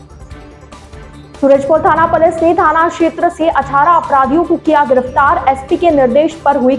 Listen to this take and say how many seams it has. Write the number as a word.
one